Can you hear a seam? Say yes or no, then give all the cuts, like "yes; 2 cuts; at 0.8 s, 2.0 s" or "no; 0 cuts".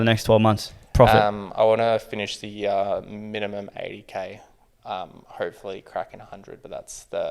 no; 0 cuts